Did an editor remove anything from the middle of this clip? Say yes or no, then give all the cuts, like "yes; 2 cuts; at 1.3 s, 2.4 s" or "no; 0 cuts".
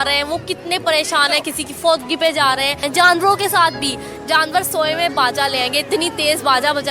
yes; 1 cut; at 2.8 s